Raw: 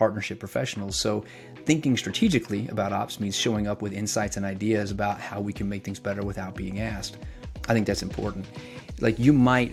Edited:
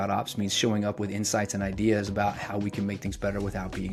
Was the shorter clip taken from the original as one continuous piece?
yes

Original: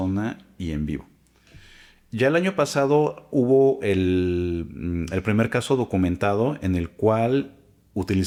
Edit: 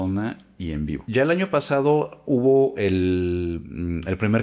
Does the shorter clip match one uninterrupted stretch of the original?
no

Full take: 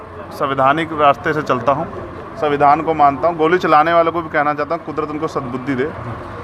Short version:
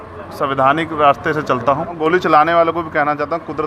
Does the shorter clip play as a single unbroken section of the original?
no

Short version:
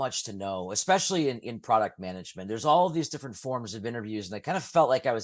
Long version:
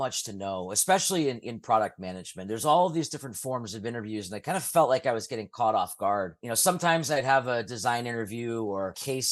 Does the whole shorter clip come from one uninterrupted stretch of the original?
yes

